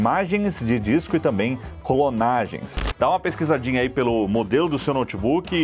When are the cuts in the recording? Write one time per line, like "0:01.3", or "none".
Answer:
0:02.8